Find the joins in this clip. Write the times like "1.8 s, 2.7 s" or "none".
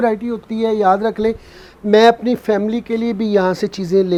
none

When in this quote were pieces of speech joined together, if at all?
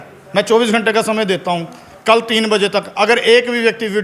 none

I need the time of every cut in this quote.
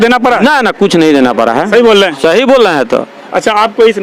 none

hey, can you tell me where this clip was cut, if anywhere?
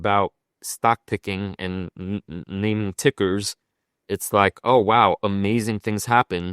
none

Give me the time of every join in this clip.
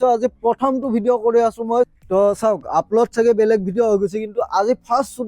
1.9 s

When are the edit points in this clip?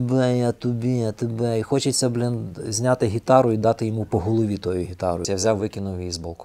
5.2 s

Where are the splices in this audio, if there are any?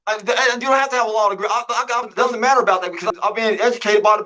2.2 s, 3.0 s

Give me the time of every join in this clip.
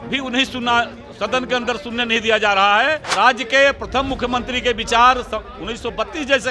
3.1 s

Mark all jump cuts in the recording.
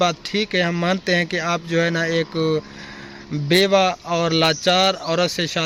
none

